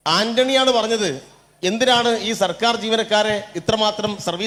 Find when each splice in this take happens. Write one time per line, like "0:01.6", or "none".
none